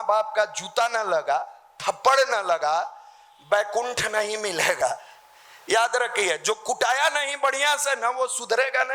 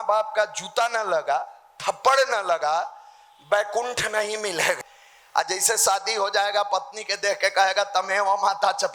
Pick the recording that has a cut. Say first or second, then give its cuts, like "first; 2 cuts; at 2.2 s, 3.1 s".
second; 1 cut; at 4.8 s